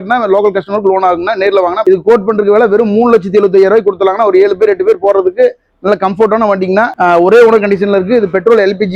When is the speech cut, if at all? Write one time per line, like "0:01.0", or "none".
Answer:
0:01.8
0:06.9